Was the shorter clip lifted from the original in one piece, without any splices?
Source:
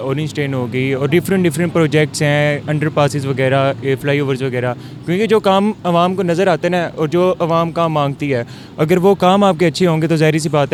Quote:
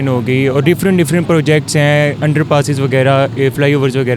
yes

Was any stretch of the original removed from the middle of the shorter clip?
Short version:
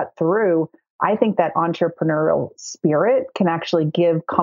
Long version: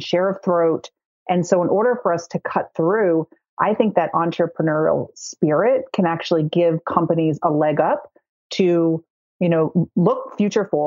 no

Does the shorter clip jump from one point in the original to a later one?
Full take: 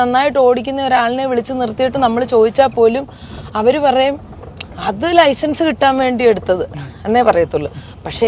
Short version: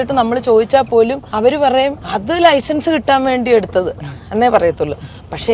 yes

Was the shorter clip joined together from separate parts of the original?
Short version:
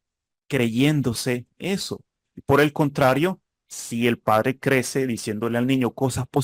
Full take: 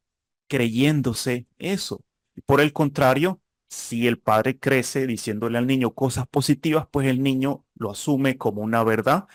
no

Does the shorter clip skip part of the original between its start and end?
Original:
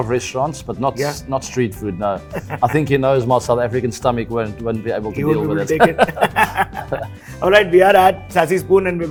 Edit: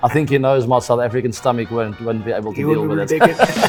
no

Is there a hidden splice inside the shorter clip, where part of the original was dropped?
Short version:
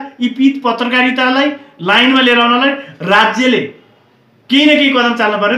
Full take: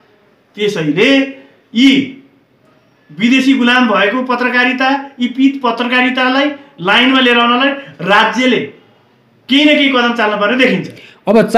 no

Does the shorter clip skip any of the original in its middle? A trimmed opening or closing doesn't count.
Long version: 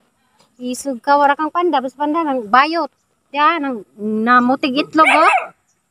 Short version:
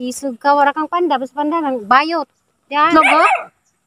yes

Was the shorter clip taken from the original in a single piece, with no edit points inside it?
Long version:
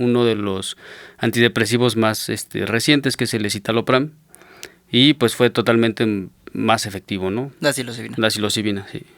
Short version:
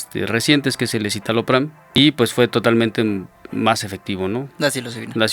no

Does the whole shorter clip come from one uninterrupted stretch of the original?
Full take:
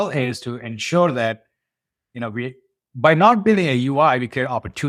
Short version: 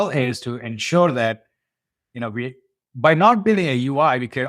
yes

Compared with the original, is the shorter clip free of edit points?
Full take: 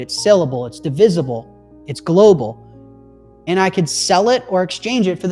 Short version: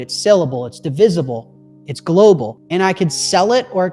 no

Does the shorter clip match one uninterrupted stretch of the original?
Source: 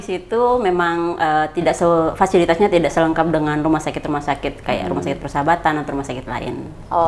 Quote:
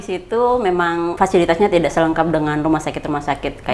no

